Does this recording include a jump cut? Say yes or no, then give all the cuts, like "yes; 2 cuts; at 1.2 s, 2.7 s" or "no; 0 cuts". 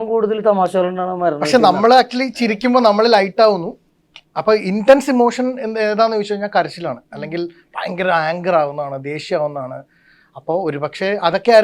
no; 0 cuts